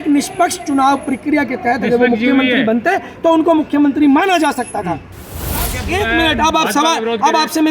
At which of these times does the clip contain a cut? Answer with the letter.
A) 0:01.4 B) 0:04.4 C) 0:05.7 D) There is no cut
C